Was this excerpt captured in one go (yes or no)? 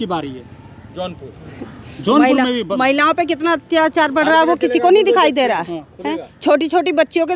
yes